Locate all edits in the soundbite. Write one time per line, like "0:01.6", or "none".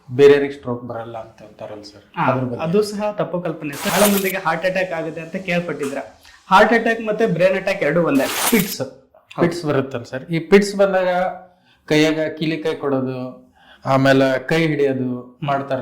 0:03.9
0:08.4